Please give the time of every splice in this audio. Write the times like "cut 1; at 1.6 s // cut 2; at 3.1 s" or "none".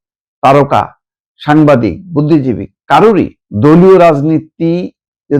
cut 1; at 3.4 s